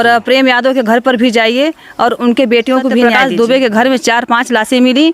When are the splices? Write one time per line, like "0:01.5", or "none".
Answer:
0:03.2